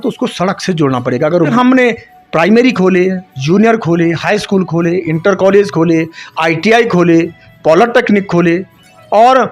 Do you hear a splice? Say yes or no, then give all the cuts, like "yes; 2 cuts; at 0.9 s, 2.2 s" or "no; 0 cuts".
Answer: yes; 1 cut; at 1.5 s